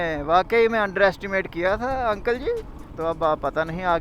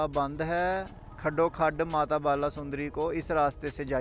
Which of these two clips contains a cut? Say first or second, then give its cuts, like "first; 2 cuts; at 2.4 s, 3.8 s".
first; 1 cut; at 2.8 s